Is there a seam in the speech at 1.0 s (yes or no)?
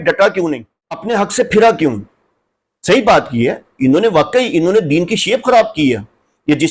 yes